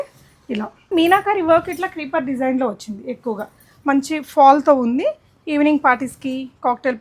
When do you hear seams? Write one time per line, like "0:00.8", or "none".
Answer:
0:00.9